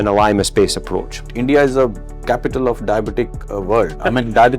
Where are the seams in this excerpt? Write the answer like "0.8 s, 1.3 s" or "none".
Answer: 1.3 s